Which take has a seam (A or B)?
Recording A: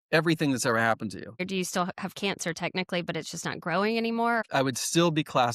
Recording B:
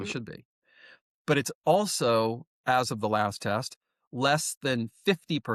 A